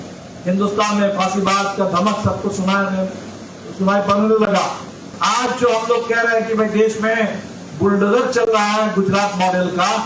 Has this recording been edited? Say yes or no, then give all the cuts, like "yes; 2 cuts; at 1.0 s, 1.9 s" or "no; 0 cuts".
yes; 1 cut; at 5.1 s